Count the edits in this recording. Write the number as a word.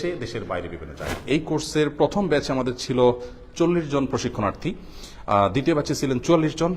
one